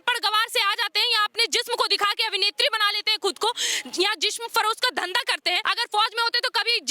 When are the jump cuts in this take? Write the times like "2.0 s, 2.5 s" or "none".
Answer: 5.6 s